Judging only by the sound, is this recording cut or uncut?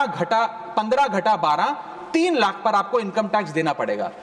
uncut